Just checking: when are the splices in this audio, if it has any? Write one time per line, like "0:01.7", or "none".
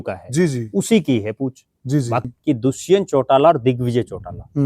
0:02.2